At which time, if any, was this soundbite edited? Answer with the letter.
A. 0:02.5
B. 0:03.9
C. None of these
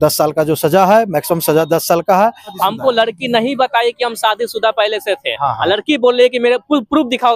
A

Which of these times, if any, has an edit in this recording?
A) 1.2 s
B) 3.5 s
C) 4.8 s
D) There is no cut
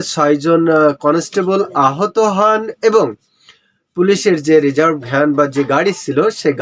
D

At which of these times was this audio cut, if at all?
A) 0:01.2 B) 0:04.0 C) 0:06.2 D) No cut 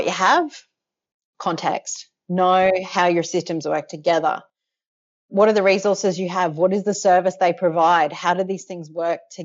A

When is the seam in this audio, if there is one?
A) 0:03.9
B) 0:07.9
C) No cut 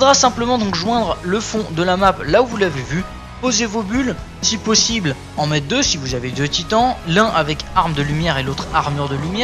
A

